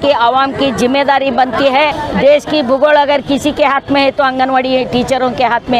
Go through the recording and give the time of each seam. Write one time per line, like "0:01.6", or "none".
0:02.0